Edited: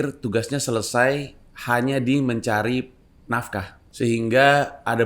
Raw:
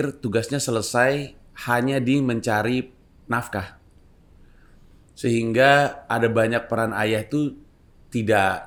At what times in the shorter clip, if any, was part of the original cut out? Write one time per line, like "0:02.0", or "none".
0:03.8